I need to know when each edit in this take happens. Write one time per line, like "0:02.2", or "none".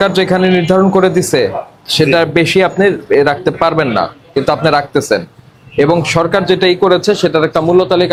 none

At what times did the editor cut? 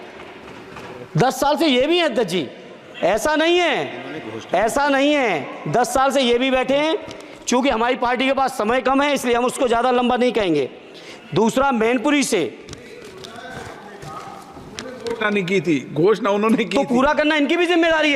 none

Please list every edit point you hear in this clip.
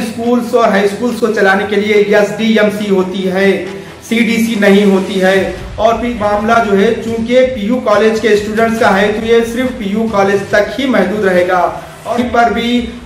0:06.2
0:12.1

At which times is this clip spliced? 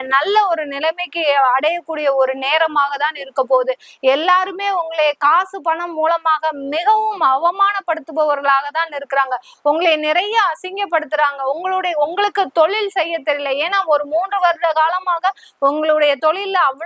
none

